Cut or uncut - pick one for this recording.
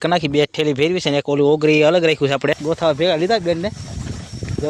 cut